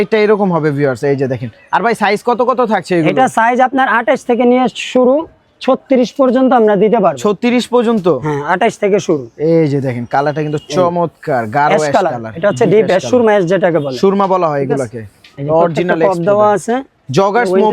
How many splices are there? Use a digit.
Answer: 0